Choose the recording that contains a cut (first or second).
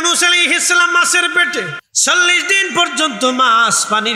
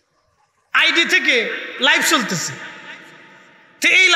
first